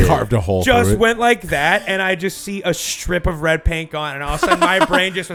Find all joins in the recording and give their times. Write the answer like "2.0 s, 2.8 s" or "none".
none